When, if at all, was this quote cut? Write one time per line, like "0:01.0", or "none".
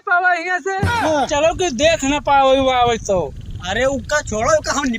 0:01.3

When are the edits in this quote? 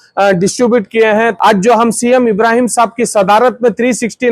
0:01.3

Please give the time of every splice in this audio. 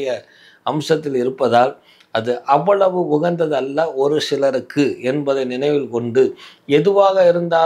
none

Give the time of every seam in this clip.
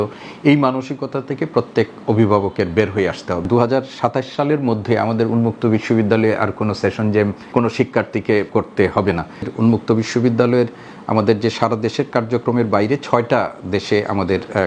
0:03.4
0:07.4
0:08.5
0:09.5

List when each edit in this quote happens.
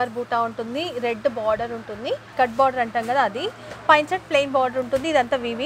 0:02.3

